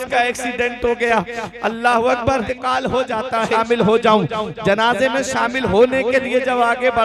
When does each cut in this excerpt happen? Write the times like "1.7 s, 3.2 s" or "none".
2.5 s, 3.5 s